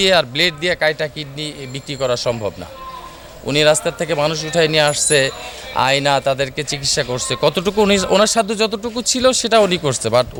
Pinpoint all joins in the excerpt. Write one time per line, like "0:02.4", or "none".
none